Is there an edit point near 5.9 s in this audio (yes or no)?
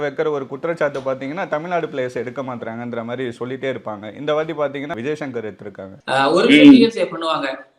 yes